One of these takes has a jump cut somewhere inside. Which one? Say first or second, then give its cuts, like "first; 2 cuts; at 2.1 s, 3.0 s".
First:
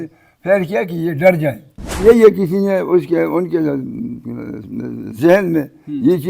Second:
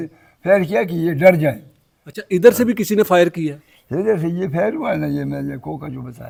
first; 1 cut; at 1.9 s